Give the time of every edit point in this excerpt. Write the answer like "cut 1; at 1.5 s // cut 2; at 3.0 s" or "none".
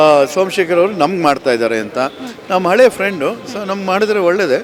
none